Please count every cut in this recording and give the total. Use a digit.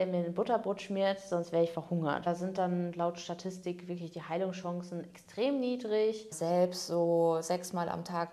2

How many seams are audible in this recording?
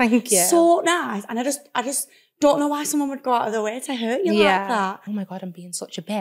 1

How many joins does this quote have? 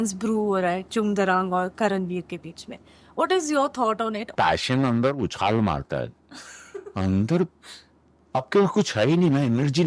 1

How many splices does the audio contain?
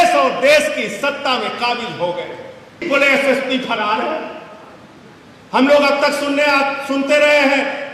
1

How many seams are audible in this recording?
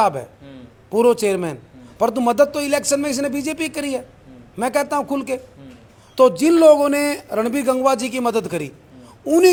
0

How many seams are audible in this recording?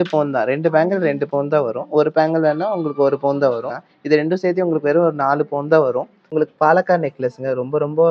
2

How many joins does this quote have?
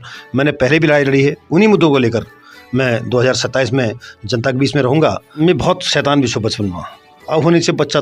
1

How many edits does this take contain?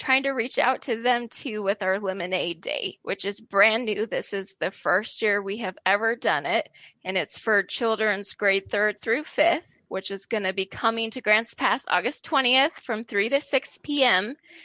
2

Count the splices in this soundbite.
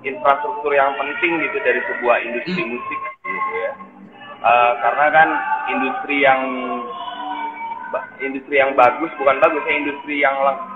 0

